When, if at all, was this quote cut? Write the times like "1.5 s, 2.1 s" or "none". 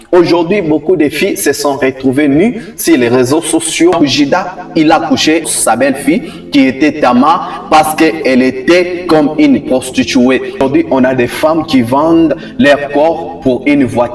4.0 s, 10.6 s